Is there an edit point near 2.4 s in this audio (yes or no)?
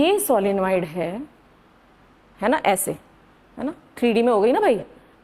no